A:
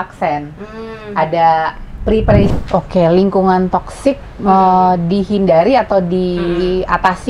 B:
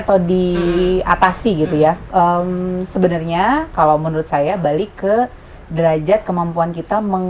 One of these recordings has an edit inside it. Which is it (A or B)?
A